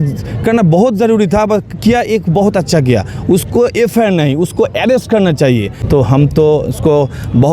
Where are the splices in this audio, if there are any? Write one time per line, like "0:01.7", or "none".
0:05.7